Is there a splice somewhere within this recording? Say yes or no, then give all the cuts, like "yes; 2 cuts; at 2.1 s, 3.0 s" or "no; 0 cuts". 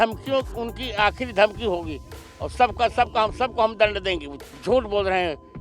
yes; 1 cut; at 4.4 s